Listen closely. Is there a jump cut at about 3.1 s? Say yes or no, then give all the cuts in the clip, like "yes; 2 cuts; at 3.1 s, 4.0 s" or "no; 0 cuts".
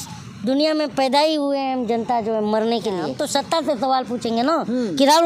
yes; 1 cut; at 3.1 s